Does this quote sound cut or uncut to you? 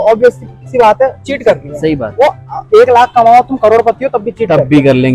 uncut